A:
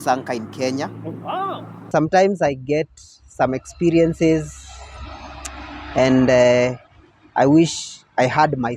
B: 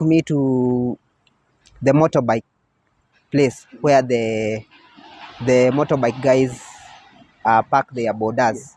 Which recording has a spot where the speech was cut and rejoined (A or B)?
A